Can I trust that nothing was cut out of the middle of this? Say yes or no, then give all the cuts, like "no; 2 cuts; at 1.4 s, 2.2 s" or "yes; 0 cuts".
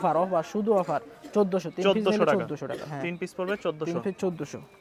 yes; 0 cuts